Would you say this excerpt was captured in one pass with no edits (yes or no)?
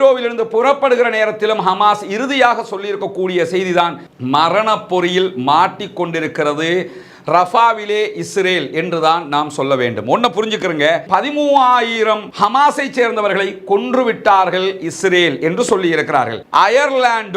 no